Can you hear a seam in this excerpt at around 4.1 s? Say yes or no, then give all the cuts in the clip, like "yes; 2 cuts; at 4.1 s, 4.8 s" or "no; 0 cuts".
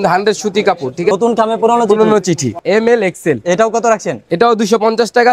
no; 2 cuts; at 1.1 s, 2.6 s